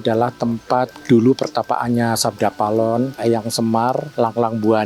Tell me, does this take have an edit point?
yes; 3 cuts; at 1.0 s, 3.2 s, 4.1 s

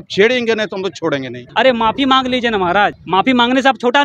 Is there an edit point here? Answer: yes; 2 cuts; at 1.4 s, 3.0 s

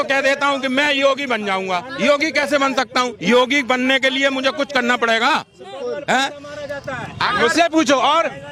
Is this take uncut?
yes; 0 cuts

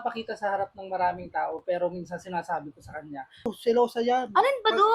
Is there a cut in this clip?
yes; 1 cut; at 3.5 s

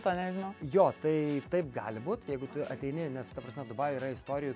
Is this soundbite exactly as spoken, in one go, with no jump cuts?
yes; 0 cuts

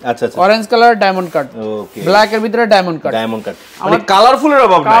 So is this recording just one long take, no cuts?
yes; 0 cuts

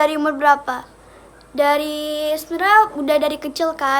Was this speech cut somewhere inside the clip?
no; 0 cuts

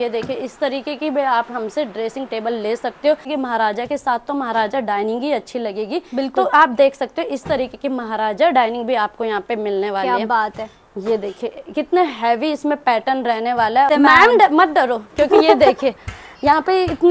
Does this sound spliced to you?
yes; 2 cuts; at 3.2 s, 13.9 s

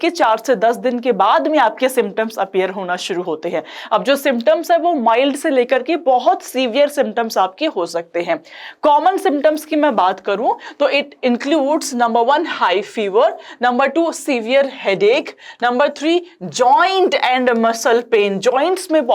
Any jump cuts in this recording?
no; 0 cuts

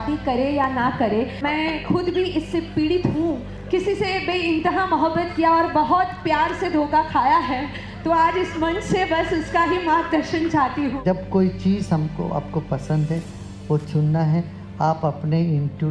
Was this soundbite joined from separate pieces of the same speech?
yes; 3 cuts; at 1.4 s, 3.5 s, 11.0 s

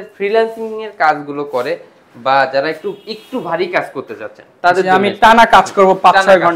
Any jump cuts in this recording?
no; 0 cuts

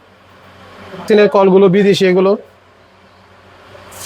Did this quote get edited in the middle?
yes; 1 cut; at 1.0 s

